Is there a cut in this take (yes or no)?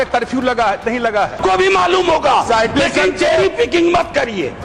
yes